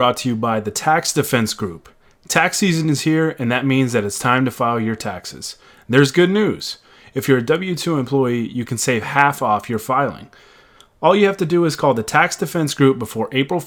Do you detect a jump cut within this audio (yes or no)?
no